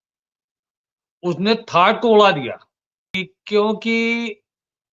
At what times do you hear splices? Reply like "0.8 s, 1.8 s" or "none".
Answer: 3.3 s

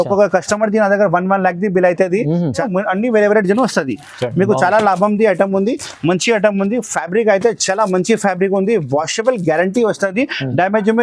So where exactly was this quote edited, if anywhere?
2.6 s

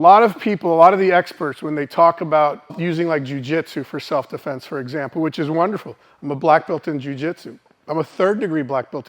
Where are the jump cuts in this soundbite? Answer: 2.8 s

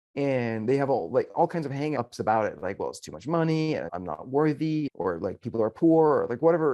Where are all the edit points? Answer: 2.0 s, 3.9 s, 4.9 s

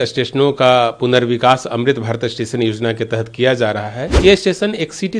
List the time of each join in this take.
4.0 s

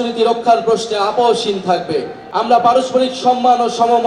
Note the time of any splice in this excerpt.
2.2 s

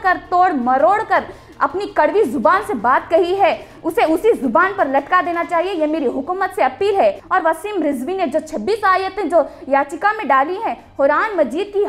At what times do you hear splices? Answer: 7.2 s

